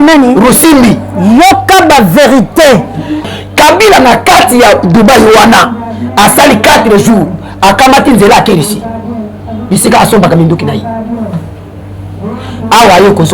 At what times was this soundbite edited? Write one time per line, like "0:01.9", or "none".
0:03.3

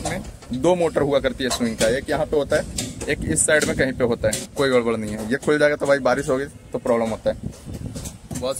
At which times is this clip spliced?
0:04.4

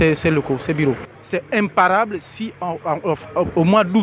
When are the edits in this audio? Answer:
0:01.1

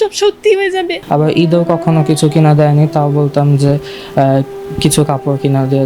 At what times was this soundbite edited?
0:01.0

